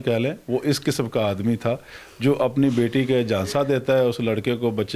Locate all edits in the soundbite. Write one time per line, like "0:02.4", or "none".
none